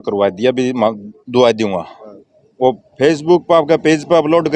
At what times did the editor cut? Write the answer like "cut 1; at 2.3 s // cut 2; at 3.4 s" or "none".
none